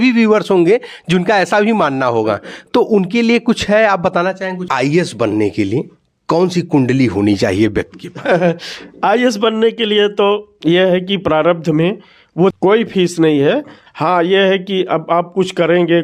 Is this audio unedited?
no; 2 cuts; at 4.7 s, 12.5 s

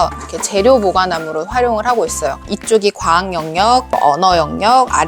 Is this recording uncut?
no; 2 cuts; at 2.5 s, 3.9 s

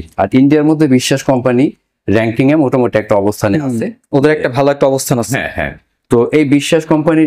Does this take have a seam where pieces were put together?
no; 0 cuts

